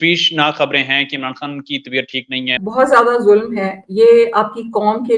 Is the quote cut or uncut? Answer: cut